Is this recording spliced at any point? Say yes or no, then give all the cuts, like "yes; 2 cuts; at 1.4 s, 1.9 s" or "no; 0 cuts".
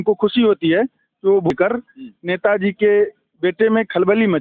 yes; 1 cut; at 1.5 s